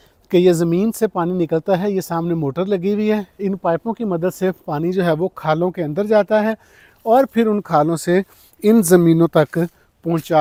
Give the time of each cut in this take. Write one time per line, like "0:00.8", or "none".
none